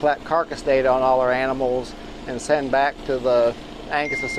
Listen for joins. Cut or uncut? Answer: uncut